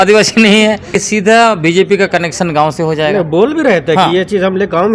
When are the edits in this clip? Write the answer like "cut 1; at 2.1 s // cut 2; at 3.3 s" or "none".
cut 1; at 1.0 s